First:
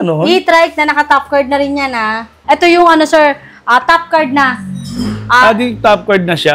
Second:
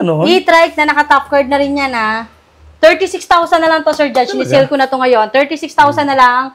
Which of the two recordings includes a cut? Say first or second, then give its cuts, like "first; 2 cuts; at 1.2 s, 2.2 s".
first; 1 cut; at 2.3 s